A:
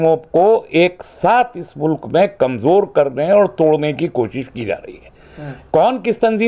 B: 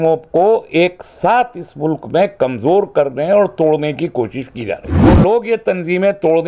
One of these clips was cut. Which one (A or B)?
B